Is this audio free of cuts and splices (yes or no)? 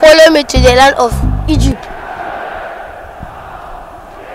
yes